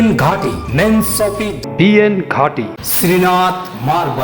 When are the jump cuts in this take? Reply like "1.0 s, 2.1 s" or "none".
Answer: 1.6 s, 2.8 s